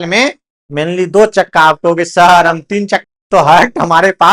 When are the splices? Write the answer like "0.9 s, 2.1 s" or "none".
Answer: 3.0 s